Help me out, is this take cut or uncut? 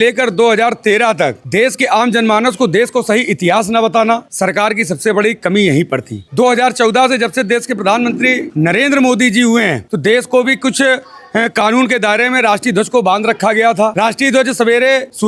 uncut